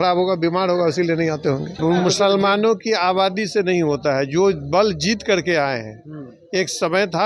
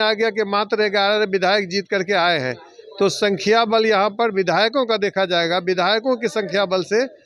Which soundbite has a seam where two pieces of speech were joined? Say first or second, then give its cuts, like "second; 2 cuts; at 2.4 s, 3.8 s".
first; 1 cut; at 1.7 s